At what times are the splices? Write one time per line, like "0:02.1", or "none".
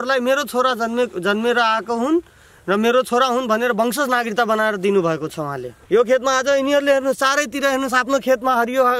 0:05.7